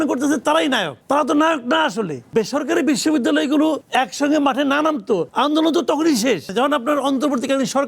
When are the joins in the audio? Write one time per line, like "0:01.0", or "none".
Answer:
0:00.9
0:02.3
0:05.3
0:06.5